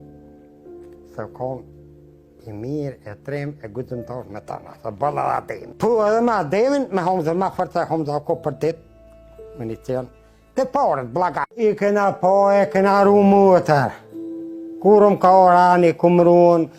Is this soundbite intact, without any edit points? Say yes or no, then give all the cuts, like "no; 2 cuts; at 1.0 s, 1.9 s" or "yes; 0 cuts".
no; 1 cut; at 11.5 s